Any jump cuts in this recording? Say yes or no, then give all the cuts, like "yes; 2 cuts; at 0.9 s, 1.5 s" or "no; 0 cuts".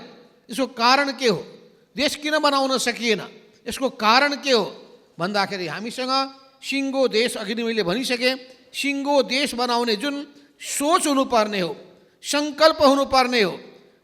no; 0 cuts